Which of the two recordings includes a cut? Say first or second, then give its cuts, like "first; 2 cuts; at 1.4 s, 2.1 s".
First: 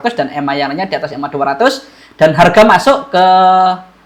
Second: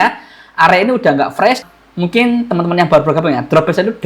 second; 1 cut; at 1.6 s